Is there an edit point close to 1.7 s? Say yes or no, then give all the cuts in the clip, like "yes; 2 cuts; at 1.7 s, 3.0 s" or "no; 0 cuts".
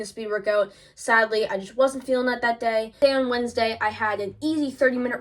no; 1 cut; at 3.0 s